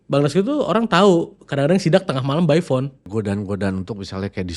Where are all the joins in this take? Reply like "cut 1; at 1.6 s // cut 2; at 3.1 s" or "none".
cut 1; at 3.1 s